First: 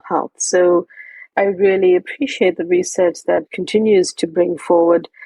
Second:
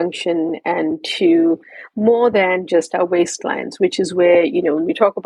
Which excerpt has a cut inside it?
first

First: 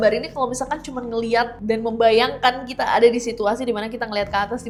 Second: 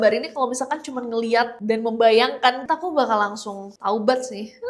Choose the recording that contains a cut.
second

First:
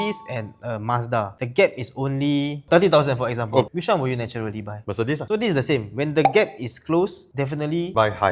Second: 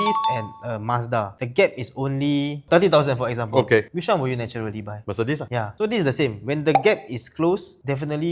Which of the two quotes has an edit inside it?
first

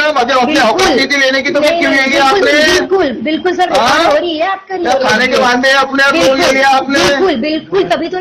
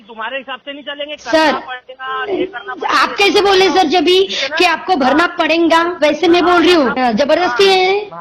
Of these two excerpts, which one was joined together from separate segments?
second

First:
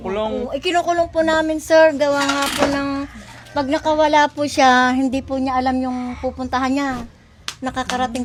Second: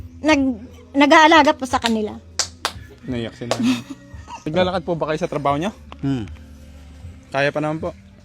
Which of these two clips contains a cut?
second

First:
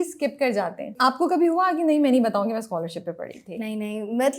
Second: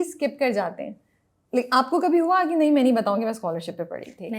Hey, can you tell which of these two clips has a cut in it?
first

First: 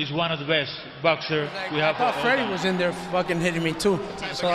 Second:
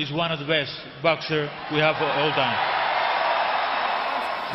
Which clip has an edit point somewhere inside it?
first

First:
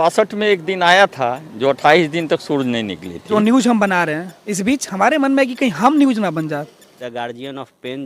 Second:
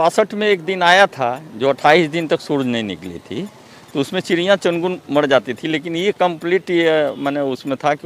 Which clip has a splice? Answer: first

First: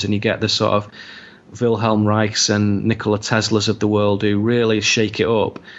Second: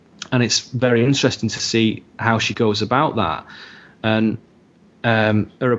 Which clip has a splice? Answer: first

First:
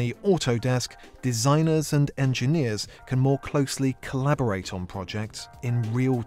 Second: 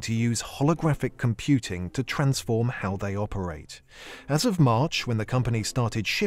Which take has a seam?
second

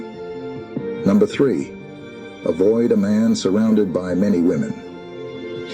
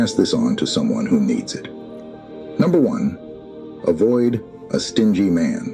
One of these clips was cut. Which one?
first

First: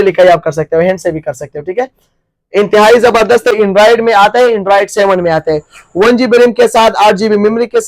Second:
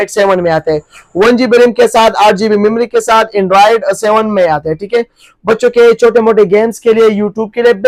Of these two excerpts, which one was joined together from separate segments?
first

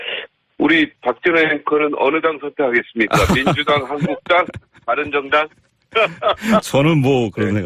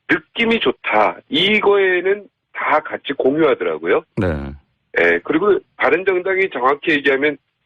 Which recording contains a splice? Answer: second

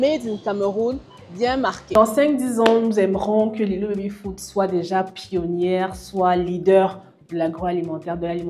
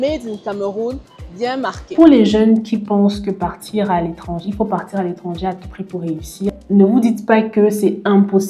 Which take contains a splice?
second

